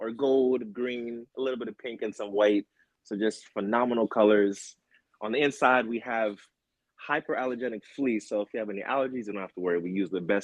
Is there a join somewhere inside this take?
no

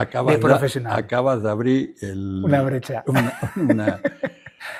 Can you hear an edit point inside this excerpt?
no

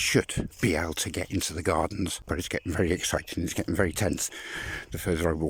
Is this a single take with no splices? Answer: no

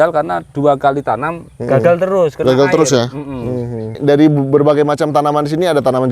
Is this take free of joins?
no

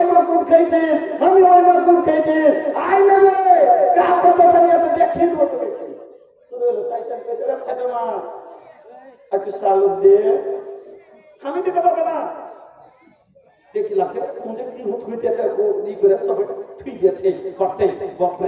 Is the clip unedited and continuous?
no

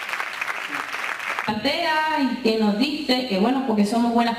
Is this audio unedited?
yes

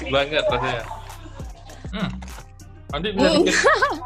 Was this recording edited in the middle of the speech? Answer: no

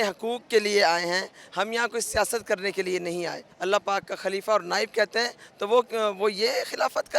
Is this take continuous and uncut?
no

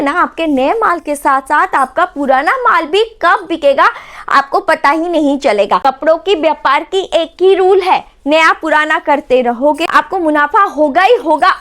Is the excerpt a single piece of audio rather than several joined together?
no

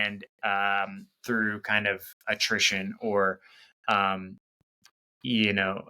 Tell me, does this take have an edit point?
no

